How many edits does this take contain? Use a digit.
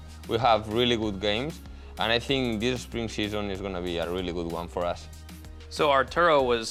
0